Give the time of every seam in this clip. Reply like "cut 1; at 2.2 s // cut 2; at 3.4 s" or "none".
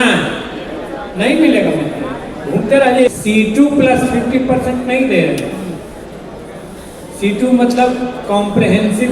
cut 1; at 3.1 s